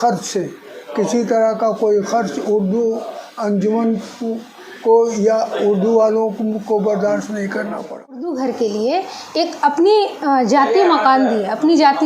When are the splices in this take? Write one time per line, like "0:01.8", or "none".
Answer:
0:08.3

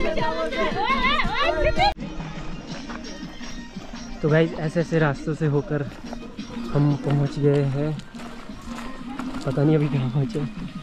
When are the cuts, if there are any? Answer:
none

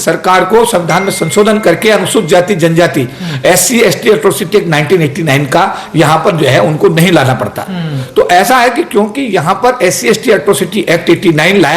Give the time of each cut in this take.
none

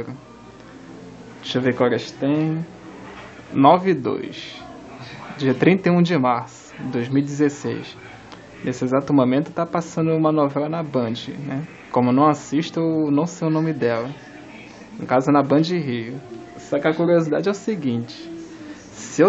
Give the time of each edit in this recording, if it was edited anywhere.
0:05.2

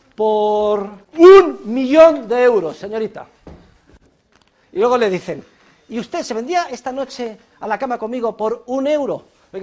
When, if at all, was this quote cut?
0:01.0

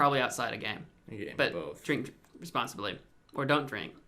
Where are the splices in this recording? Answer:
0:03.1

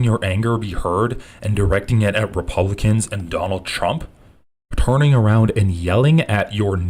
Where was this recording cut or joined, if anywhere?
none

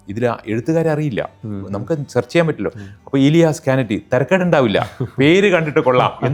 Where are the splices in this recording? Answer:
none

